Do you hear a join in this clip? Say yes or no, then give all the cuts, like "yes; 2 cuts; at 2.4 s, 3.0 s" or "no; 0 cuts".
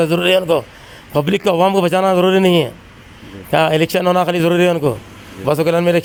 no; 0 cuts